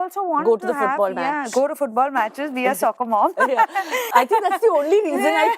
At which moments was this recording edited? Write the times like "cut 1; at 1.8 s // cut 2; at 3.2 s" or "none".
cut 1; at 4.1 s